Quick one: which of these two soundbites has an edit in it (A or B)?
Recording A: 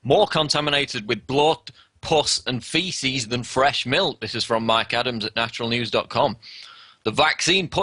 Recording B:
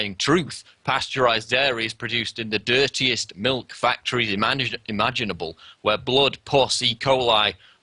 B